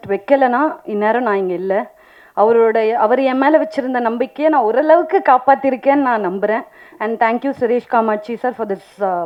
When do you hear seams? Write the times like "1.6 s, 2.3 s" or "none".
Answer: none